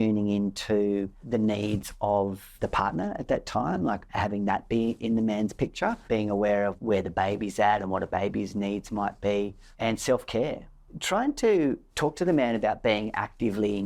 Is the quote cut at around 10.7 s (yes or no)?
yes